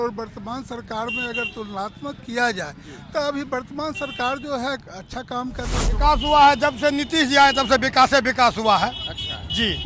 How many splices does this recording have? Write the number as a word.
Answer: one